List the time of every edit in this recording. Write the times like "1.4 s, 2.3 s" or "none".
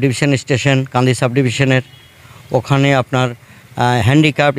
none